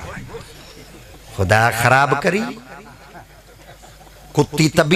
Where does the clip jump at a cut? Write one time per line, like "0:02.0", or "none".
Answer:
none